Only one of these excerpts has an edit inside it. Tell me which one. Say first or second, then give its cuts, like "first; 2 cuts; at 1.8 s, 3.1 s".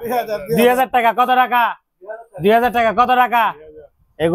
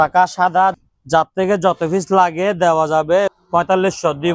second; 2 cuts; at 0.8 s, 3.3 s